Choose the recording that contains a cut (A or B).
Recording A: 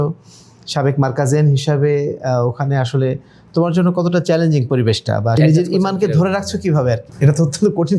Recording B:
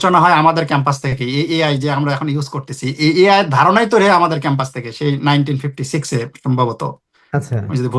A